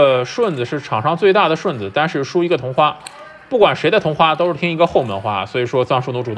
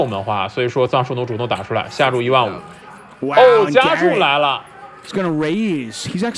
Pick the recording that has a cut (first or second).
second